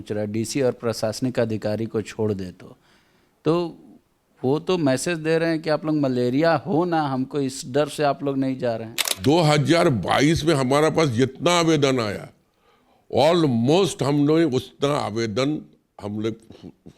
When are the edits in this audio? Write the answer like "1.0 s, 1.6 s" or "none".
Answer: 9.0 s